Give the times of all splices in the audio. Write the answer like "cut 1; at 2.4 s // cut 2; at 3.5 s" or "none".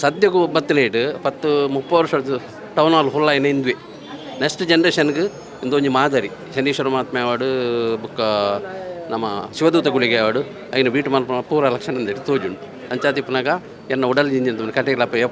none